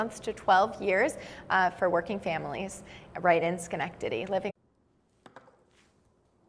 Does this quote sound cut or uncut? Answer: uncut